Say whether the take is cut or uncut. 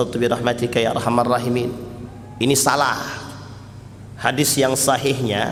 uncut